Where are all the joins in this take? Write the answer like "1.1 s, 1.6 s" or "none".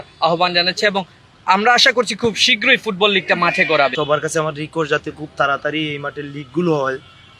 3.9 s